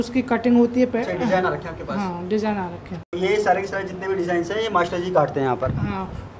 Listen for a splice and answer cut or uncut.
uncut